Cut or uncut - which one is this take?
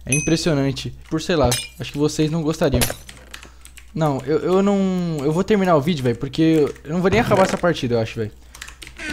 cut